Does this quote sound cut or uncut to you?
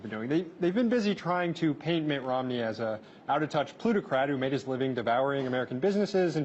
uncut